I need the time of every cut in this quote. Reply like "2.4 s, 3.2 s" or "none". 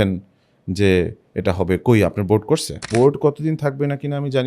2.9 s